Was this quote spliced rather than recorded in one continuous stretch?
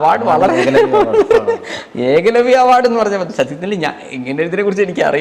no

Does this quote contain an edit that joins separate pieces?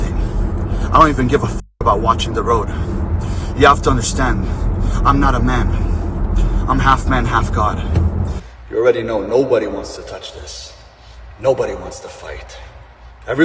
yes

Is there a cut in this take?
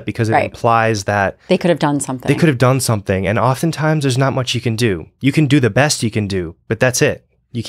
no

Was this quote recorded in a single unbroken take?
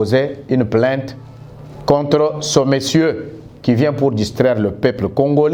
yes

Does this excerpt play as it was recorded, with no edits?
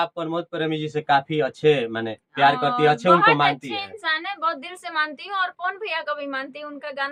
yes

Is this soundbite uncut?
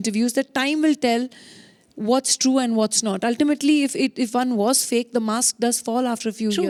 yes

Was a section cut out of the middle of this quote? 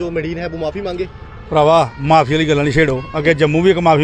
no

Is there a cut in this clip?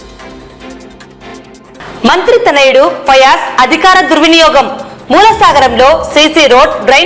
yes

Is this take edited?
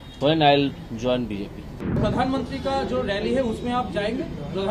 yes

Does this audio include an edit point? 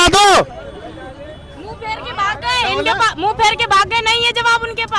no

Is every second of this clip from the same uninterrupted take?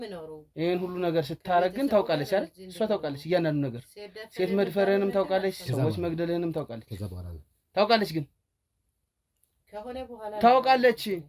yes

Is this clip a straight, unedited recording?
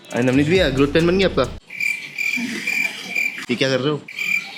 yes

